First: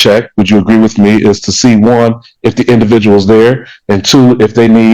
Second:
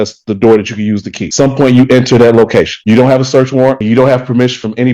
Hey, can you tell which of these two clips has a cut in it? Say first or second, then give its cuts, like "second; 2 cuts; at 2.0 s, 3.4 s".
second; 3 cuts; at 1.2 s, 2.8 s, 3.8 s